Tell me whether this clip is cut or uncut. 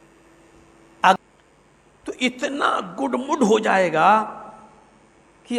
cut